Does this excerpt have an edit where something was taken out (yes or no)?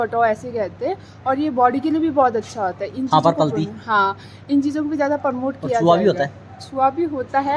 no